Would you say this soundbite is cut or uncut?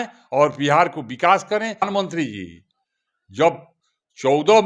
cut